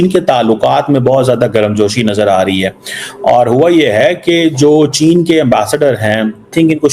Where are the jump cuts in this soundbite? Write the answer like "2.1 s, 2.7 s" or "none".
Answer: none